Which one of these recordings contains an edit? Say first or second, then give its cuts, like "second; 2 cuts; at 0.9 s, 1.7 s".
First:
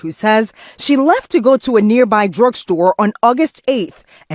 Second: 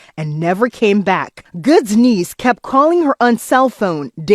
second; 1 cut; at 1.5 s